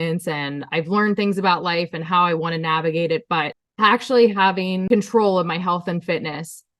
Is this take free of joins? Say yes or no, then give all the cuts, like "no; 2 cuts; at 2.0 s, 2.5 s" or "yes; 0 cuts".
no; 2 cuts; at 3.6 s, 4.8 s